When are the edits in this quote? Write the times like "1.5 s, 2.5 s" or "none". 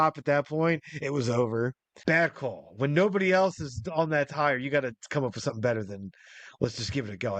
1.9 s